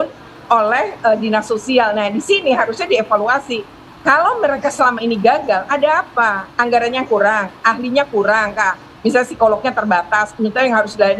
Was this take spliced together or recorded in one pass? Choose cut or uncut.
uncut